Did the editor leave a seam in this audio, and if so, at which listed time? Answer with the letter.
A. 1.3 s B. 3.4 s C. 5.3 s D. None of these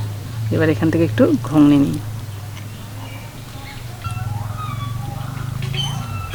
D